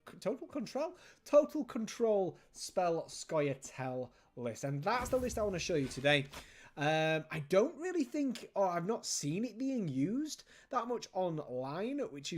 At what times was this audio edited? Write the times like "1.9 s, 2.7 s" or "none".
4.9 s